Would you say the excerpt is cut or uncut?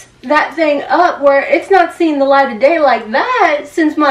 uncut